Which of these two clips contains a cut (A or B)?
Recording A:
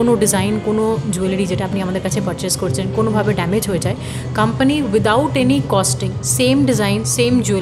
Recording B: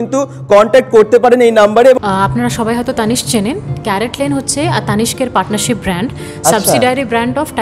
B